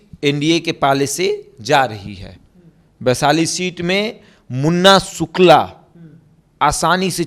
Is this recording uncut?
yes; 0 cuts

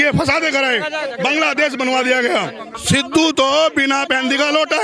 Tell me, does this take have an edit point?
yes; 1 cut; at 2.7 s

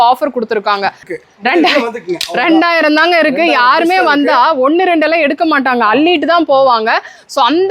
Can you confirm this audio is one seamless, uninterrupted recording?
no; 1 cut; at 1.1 s

